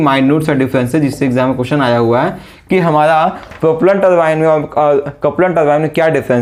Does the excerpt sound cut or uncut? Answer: uncut